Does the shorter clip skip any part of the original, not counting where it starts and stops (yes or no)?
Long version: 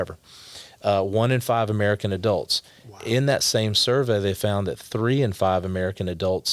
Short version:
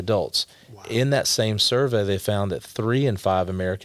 no